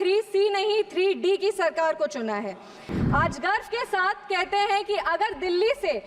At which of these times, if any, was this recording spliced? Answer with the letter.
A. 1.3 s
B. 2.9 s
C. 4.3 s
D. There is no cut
B